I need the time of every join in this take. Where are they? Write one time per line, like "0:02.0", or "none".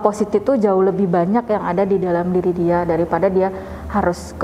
none